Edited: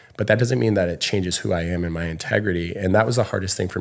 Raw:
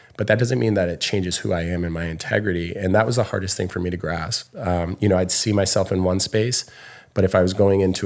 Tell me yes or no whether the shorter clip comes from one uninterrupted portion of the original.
yes